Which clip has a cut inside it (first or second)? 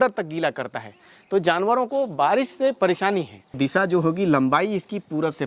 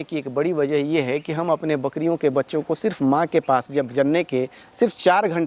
first